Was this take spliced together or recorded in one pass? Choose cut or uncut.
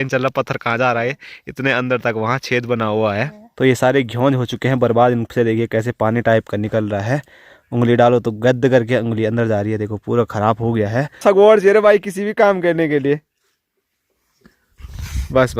cut